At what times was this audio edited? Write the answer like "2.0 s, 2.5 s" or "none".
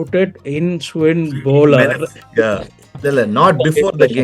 2.9 s